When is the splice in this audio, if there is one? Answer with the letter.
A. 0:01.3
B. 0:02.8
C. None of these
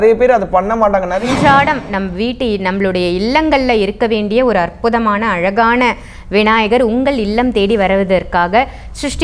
A